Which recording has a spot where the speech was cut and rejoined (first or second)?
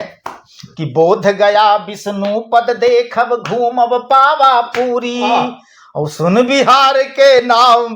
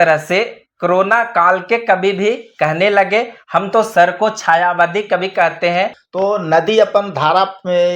second